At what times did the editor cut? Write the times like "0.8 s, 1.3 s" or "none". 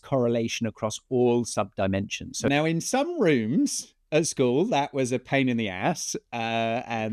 2.3 s